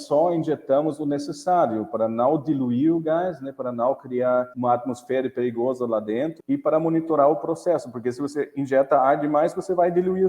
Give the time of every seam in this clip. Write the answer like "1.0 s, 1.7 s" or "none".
4.5 s, 6.4 s

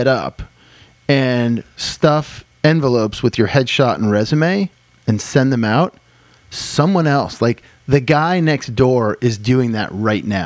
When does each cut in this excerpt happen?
none

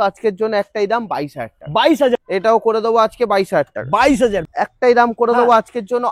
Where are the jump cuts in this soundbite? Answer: 2.2 s, 4.5 s

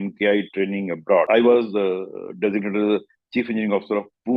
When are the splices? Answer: 1.3 s

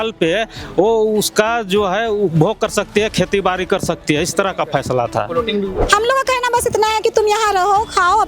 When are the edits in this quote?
5.9 s

